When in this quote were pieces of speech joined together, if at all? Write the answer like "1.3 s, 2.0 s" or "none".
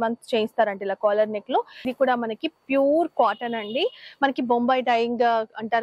1.8 s